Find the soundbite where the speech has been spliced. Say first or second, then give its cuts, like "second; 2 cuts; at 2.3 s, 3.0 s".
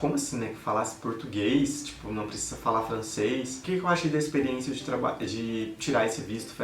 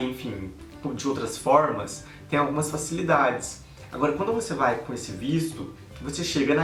first; 1 cut; at 3.6 s